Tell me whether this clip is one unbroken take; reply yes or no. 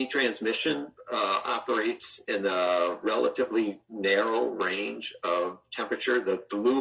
yes